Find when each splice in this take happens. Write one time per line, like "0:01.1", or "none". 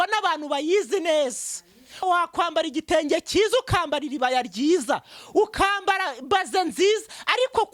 0:02.0